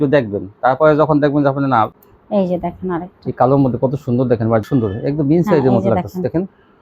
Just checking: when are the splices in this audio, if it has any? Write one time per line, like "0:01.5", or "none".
0:02.1
0:04.7